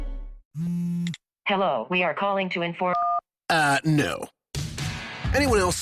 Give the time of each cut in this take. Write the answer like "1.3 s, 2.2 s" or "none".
none